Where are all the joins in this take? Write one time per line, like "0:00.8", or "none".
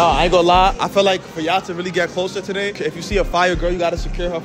0:02.8